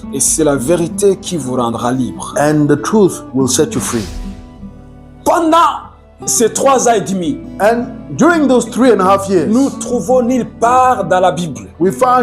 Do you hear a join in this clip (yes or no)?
yes